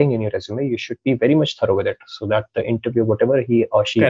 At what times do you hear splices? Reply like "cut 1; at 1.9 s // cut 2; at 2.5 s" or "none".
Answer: none